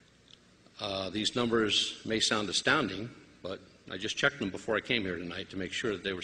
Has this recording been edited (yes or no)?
yes